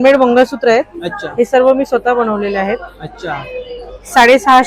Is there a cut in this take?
no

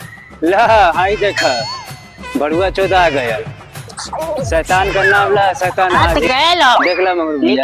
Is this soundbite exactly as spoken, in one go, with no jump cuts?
no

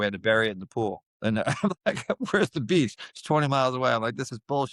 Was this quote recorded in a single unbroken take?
yes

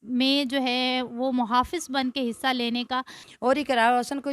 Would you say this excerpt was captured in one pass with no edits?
no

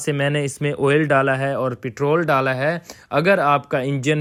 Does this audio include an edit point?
no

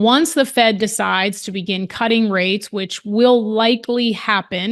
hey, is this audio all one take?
yes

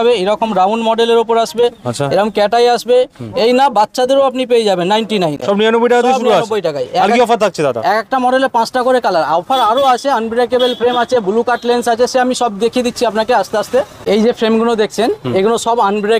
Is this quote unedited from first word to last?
yes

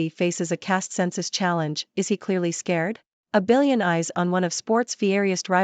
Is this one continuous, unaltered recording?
no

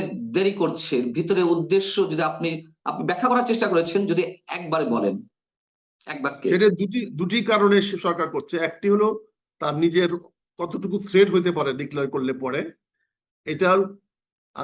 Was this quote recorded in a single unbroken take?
yes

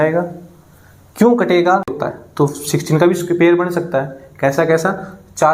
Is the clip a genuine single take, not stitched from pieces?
no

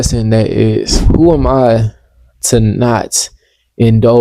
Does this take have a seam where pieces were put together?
yes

